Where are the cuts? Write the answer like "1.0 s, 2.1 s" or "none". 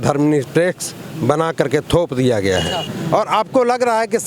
2.9 s